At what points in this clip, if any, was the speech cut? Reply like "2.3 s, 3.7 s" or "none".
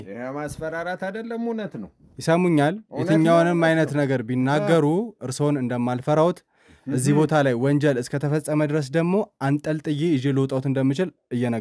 none